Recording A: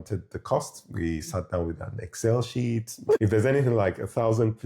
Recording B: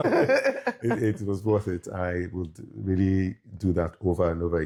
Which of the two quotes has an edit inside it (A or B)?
A